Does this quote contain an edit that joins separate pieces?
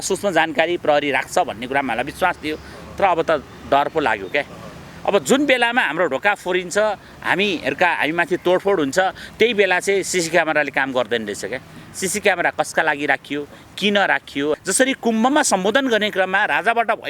yes; 1 cut; at 14.6 s

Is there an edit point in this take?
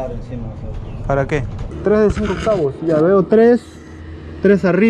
yes; 1 cut; at 1.7 s

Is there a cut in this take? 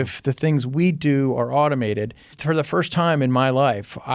yes; 1 cut; at 2.4 s

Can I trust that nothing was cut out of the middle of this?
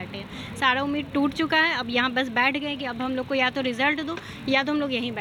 yes; 0 cuts

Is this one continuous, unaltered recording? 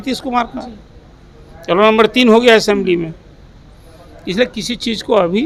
yes; 0 cuts

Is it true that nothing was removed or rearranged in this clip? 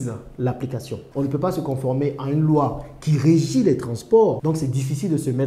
no; 2 cuts; at 1.1 s, 4.4 s

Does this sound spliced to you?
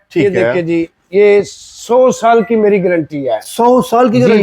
no; 0 cuts

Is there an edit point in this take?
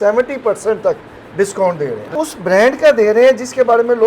yes; 1 cut; at 2.1 s

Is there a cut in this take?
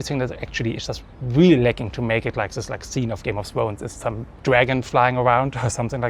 no; 0 cuts

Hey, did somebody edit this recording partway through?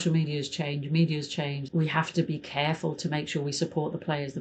yes; 1 cut; at 1.6 s

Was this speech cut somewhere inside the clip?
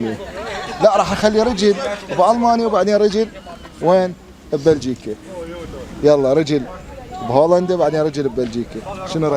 no; 0 cuts

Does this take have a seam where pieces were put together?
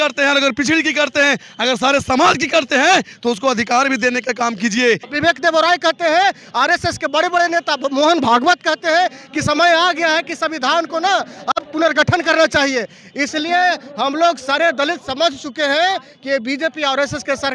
yes; 1 cut; at 5.1 s

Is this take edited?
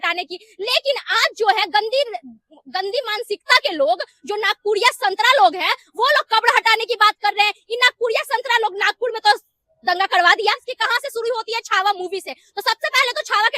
yes; 1 cut; at 10.7 s

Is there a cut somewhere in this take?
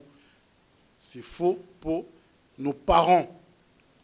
no; 0 cuts

